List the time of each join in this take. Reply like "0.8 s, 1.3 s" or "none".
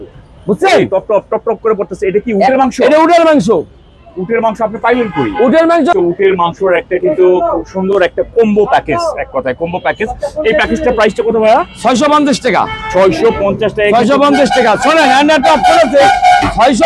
5.9 s